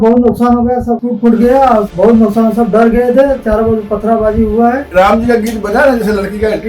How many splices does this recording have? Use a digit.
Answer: 3